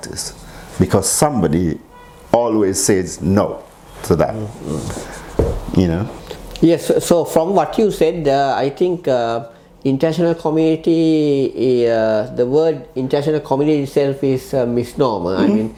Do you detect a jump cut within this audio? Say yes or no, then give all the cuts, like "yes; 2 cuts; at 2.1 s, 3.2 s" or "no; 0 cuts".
no; 0 cuts